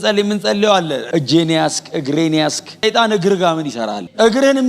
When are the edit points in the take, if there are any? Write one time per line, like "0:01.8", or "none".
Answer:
0:01.0
0:02.8